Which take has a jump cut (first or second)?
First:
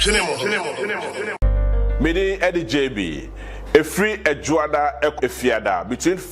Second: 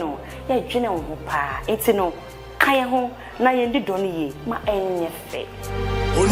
first